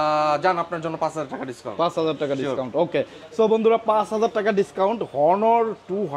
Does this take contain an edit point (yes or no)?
no